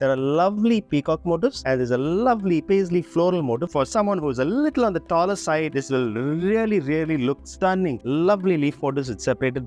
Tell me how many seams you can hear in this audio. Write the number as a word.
two